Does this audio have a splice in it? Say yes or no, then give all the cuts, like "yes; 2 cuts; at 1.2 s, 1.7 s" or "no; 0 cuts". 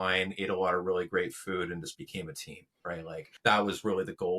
yes; 1 cut; at 3.3 s